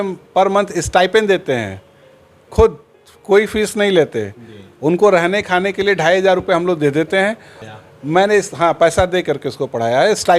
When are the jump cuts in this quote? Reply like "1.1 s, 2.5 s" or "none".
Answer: 7.5 s